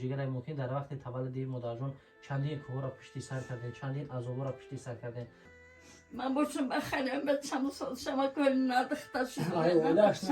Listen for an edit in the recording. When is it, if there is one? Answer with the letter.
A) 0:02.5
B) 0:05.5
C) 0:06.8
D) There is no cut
B